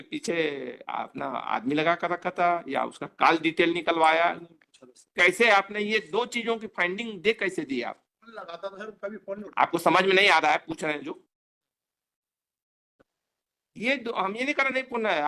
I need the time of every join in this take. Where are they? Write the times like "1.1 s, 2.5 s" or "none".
none